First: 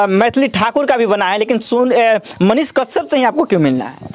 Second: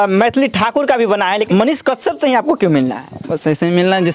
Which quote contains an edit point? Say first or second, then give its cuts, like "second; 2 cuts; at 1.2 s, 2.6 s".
second; 1 cut; at 1.4 s